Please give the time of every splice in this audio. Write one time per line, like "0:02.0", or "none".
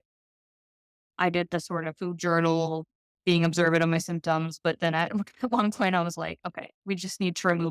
none